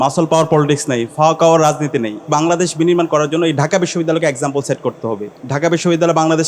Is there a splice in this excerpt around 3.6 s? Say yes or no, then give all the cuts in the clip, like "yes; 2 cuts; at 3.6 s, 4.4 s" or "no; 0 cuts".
no; 2 cuts; at 2.3 s, 5.3 s